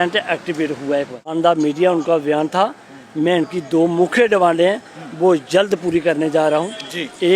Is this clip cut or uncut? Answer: cut